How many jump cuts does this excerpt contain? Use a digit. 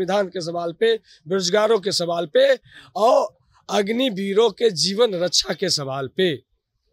0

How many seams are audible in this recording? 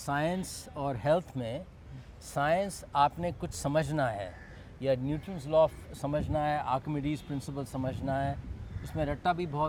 0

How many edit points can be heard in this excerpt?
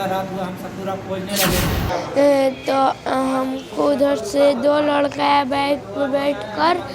1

